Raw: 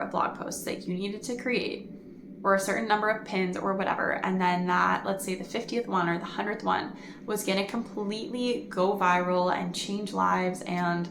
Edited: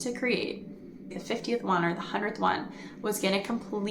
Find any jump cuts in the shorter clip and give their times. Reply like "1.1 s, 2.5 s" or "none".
1.1 s

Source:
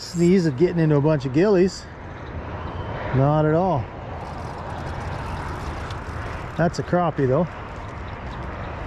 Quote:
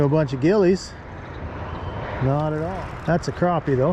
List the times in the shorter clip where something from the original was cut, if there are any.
2.7 s

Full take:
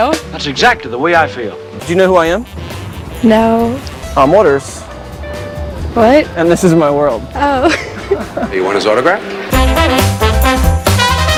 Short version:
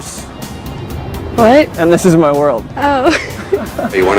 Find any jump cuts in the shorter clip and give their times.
none

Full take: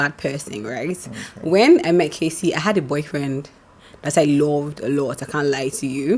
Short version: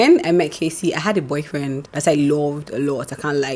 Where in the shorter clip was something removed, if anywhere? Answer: 1.9 s

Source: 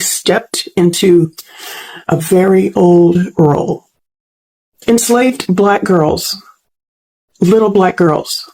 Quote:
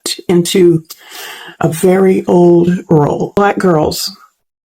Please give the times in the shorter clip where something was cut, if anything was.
3.4 s

